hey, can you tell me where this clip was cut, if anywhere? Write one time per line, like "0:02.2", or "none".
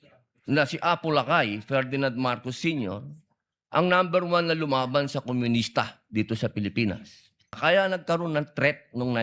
0:07.5